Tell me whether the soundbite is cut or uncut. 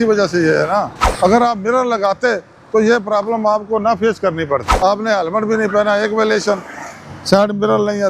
cut